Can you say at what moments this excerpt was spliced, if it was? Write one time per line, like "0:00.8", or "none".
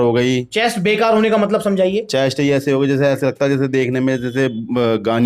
none